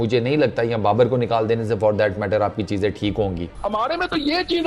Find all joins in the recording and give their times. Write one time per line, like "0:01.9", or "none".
none